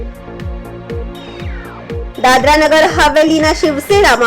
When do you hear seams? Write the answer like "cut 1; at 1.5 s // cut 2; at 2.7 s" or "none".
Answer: cut 1; at 1.1 s